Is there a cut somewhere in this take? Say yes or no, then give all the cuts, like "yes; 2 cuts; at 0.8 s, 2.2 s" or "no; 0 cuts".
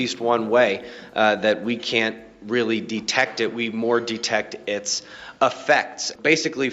yes; 1 cut; at 4.5 s